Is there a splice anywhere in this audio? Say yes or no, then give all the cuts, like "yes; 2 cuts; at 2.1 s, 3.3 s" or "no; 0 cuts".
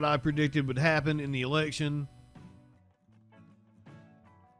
no; 0 cuts